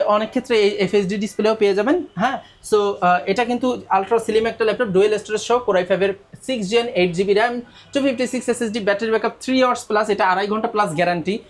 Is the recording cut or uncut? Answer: uncut